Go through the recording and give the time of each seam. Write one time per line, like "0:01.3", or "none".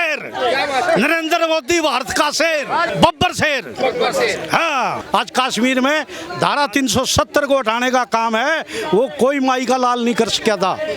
0:02.9
0:05.0

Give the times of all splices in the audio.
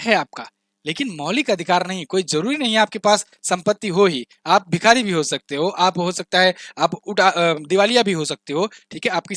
none

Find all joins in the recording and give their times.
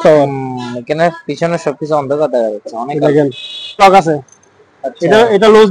0:03.8

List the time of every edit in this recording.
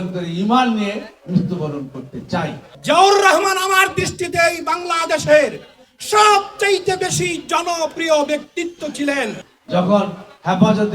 0:02.6
0:09.5

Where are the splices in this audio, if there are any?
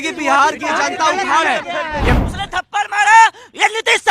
0:02.2

